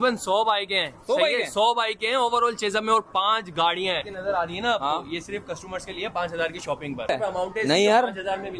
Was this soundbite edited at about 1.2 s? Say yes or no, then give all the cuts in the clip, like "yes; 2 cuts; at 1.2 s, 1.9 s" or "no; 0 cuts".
no; 2 cuts; at 4.0 s, 7.1 s